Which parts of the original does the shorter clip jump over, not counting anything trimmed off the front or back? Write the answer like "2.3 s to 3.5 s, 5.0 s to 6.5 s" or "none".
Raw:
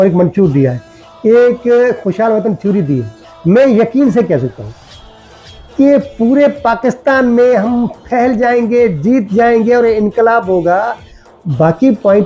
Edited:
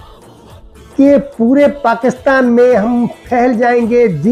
none